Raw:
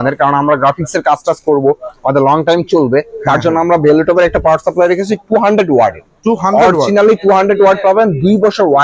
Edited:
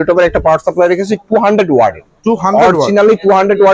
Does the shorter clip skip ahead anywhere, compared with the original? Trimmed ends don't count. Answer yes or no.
no